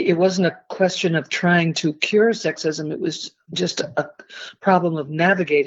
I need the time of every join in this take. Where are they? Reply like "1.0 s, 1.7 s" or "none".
none